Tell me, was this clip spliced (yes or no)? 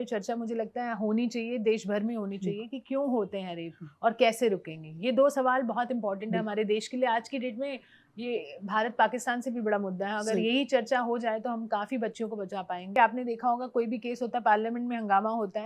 yes